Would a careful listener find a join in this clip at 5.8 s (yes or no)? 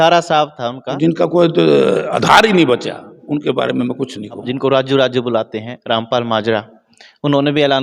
no